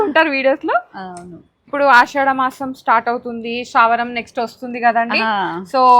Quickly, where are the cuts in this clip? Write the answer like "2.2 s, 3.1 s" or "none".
1.7 s